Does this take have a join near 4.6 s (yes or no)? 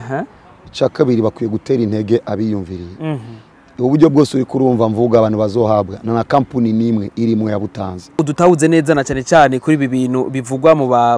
no